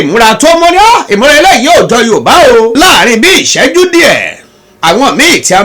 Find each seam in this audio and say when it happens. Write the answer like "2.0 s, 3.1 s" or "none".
2.7 s